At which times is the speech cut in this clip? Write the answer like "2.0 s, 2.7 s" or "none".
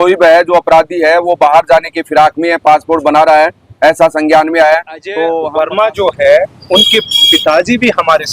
5.4 s

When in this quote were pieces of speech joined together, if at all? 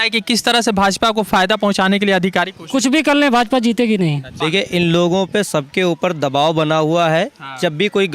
none

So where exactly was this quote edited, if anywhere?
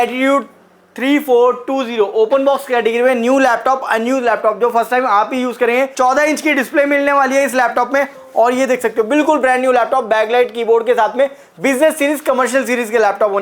5.9 s

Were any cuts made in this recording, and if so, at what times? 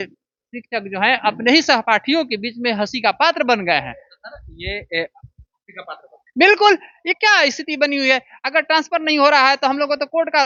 none

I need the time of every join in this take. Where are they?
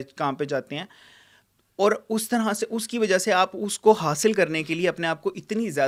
none

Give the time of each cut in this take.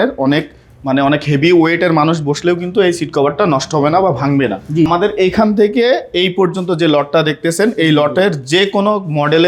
4.9 s

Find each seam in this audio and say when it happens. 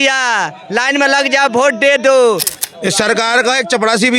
2.5 s

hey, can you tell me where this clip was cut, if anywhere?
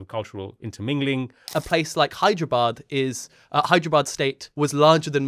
1.4 s, 4.4 s

